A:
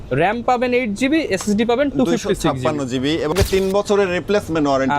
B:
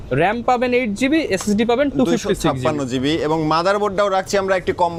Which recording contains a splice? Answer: A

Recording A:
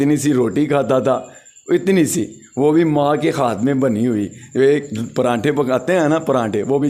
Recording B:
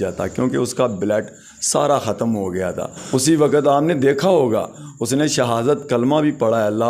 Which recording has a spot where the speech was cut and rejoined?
B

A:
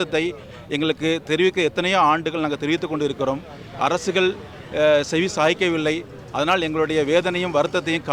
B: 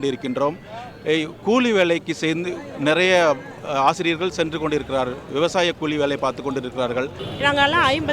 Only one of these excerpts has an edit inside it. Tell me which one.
B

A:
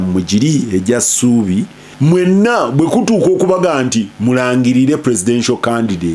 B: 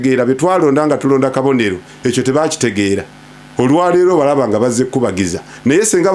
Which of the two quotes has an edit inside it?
A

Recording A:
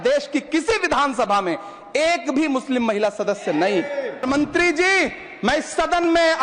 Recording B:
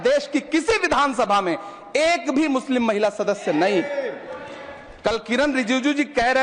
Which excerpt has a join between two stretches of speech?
A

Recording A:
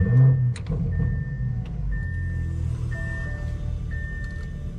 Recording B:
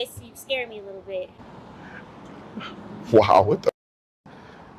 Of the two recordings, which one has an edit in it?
B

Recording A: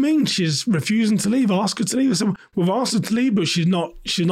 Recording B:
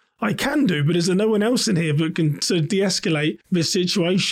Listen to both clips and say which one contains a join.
B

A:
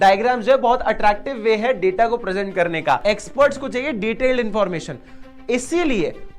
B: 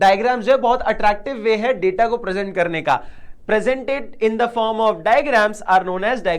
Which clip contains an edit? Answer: A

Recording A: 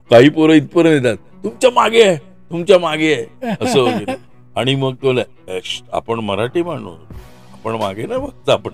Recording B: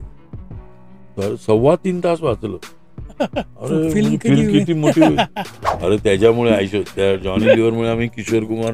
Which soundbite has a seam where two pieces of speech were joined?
B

